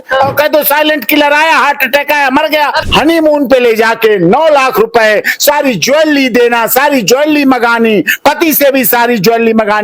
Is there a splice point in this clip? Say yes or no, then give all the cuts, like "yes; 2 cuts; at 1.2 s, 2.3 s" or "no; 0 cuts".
yes; 1 cut; at 2.8 s